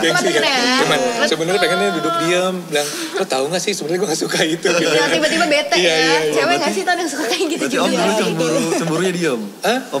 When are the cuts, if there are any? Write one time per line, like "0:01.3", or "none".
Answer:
none